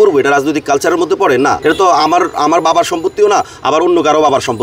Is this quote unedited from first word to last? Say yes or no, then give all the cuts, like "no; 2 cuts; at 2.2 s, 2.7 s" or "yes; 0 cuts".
no; 1 cut; at 1.6 s